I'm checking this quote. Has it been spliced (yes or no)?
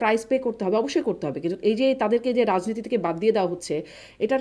no